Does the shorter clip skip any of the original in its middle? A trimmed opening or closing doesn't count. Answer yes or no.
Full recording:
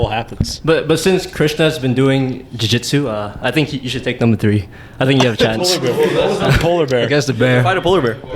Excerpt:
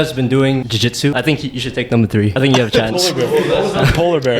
yes